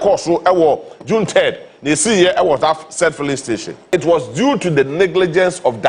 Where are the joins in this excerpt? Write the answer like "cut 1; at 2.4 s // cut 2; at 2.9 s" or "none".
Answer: cut 1; at 3.9 s